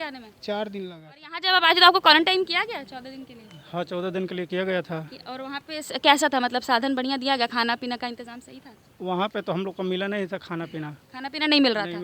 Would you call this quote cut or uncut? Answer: cut